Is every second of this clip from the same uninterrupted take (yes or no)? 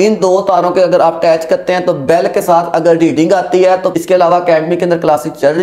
no